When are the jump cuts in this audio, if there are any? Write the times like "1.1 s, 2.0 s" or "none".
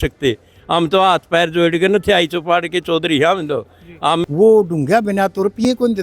4.2 s